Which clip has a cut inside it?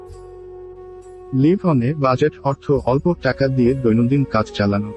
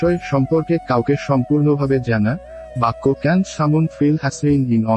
first; 1 cut; at 1.3 s

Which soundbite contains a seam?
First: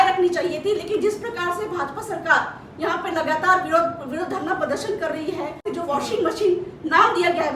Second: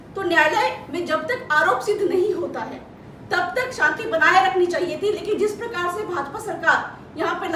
first; 1 cut; at 5.7 s

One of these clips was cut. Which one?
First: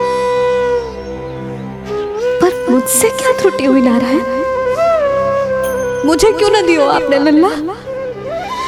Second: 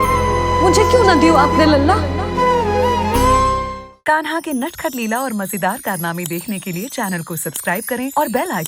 second; 1 cut; at 3.6 s

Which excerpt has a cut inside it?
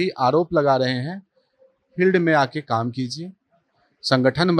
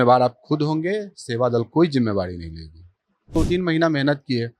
second; 1 cut; at 3.5 s

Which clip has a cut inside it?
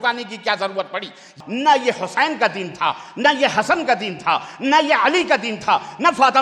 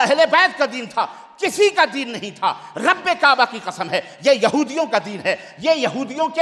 first; 1 cut; at 1.3 s

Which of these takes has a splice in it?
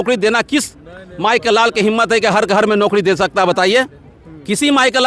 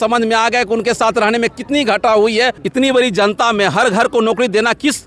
second; 1 cut; at 2.6 s

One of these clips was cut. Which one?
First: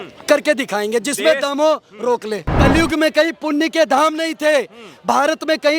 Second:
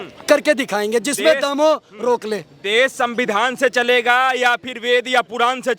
first; 1 cut; at 2.5 s

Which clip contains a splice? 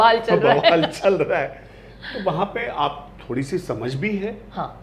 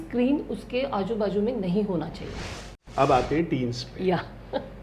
second; 1 cut; at 2.8 s

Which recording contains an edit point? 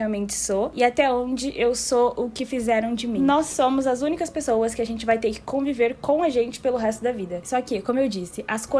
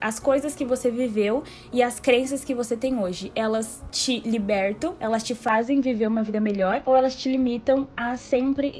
first; 2 cuts; at 3.1 s, 7.4 s

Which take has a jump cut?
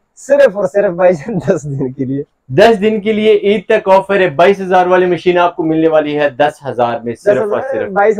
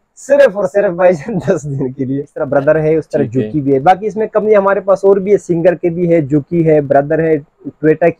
second; 1 cut; at 2.4 s

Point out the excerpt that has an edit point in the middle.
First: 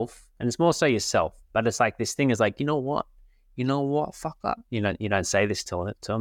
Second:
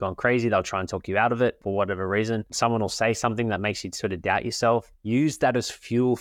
second; 3 cuts; at 1.6 s, 2.5 s, 4.9 s

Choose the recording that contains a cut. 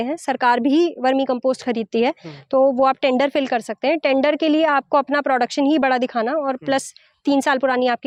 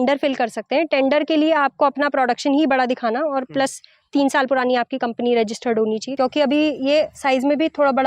second; 1 cut; at 6.1 s

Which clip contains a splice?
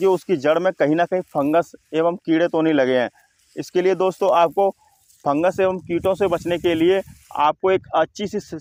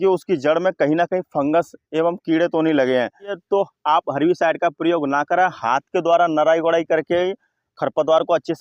second; 1 cut; at 3.4 s

